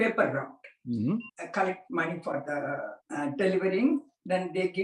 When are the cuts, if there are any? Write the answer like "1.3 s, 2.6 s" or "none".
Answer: 1.3 s, 3.0 s